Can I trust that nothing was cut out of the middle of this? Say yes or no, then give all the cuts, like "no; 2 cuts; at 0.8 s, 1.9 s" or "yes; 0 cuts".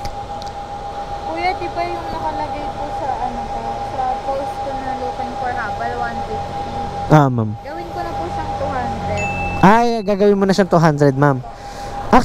no; 1 cut; at 1.0 s